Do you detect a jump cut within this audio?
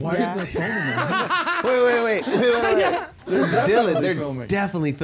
yes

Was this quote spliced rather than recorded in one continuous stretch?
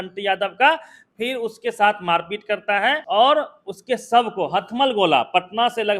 yes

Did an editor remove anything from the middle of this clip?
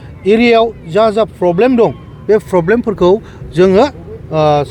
no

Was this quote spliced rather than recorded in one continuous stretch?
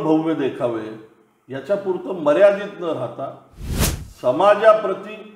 no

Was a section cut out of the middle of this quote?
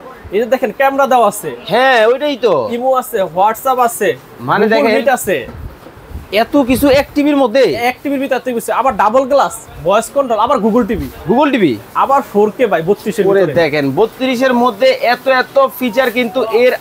no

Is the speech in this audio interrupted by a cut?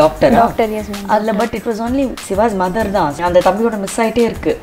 yes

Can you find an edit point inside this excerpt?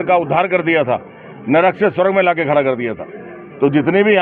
no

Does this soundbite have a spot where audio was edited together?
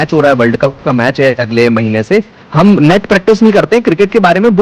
no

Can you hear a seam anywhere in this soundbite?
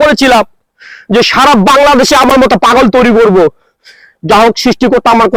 no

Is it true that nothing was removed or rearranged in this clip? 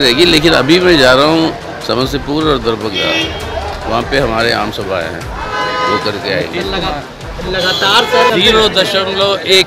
no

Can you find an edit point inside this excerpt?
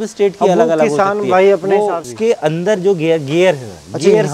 yes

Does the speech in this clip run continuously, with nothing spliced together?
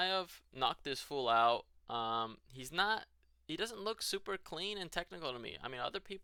yes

